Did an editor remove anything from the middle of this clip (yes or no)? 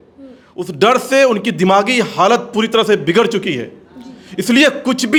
no